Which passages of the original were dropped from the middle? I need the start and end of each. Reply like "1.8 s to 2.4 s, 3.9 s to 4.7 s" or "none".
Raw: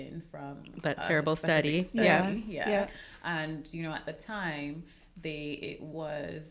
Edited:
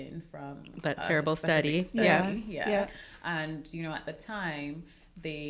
none